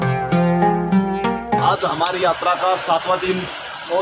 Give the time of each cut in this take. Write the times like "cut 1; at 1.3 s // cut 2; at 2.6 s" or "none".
cut 1; at 1.6 s